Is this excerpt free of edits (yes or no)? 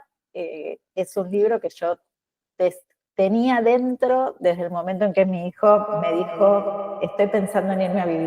yes